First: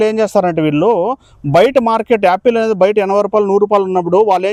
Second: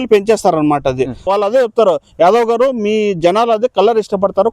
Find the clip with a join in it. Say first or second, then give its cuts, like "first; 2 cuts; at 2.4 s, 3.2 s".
second; 1 cut; at 1.3 s